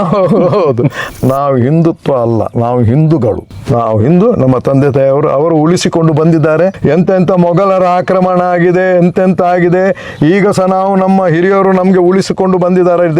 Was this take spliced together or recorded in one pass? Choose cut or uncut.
cut